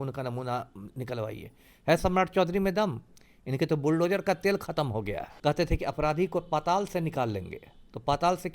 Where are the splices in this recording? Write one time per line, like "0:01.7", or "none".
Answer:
0:05.2